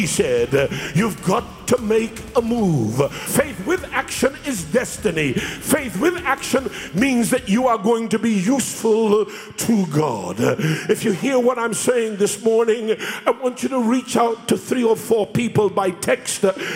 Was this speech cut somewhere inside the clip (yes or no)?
yes